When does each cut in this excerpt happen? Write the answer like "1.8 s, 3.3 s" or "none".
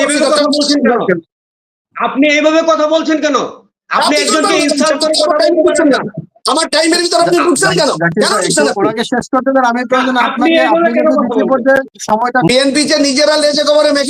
12.5 s